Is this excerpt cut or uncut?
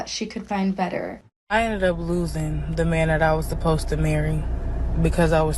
cut